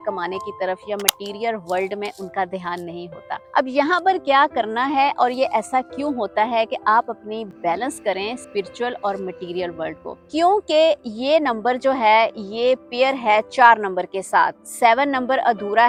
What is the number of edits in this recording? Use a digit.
0